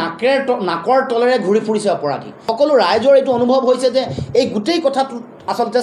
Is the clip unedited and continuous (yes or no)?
no